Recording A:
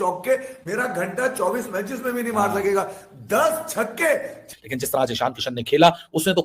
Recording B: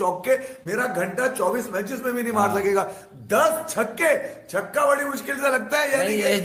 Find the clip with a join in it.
A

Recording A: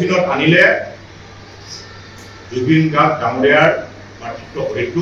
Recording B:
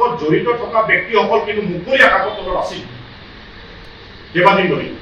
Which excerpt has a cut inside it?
B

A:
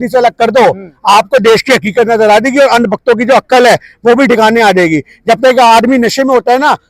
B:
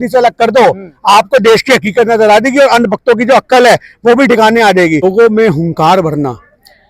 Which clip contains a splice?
B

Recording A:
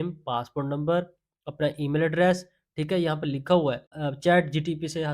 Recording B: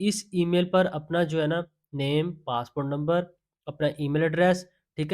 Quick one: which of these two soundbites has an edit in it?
A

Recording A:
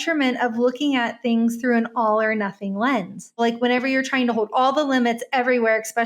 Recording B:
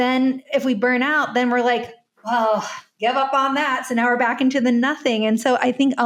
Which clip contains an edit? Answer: A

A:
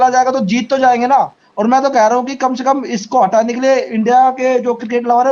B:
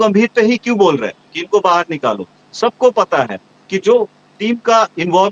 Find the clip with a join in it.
A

